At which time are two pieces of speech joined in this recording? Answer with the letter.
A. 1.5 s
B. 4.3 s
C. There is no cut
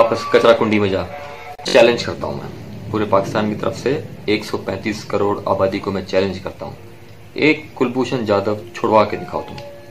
A